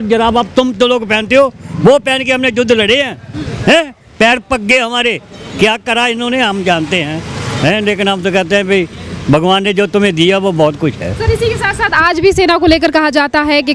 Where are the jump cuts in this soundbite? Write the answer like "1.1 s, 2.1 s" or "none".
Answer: none

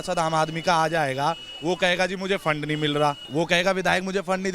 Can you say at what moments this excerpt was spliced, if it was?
3.2 s

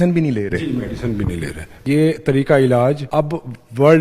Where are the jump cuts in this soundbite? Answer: 1.8 s, 3.0 s

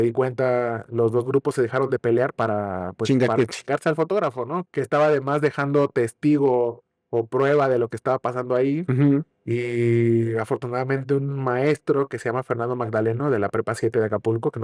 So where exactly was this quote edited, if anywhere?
4.6 s

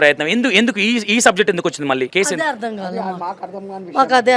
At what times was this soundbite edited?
2.1 s

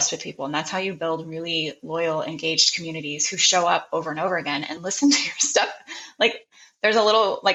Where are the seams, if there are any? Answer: none

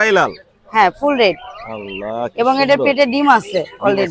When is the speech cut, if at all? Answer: none

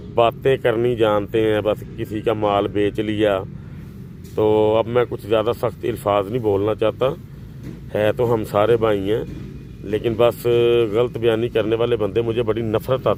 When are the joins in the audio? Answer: none

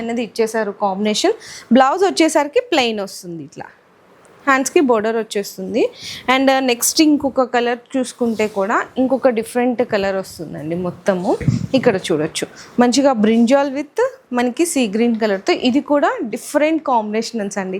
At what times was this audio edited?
none

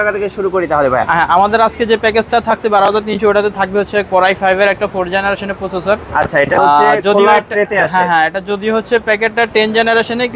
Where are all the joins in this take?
none

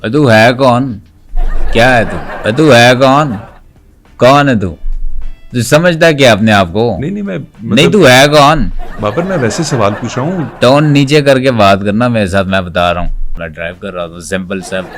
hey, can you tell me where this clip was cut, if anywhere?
2.3 s, 13.4 s

